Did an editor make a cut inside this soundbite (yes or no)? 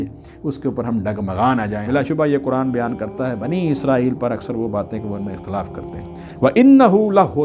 yes